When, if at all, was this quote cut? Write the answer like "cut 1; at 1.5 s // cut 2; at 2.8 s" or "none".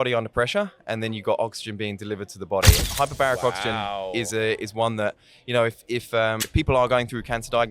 cut 1; at 2.8 s // cut 2; at 6.4 s